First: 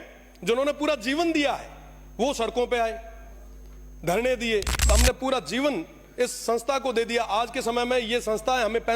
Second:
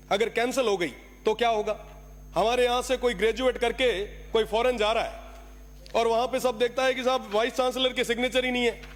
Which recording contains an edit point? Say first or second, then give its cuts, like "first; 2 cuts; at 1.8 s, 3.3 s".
first; 1 cut; at 4.8 s